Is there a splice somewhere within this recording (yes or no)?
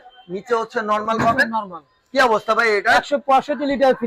no